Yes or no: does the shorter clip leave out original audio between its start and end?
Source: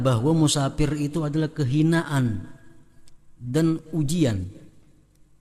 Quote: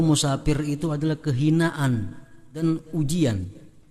yes